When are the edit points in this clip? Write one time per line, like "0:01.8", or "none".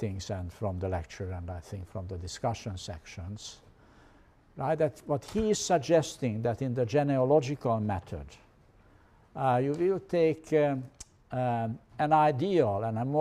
none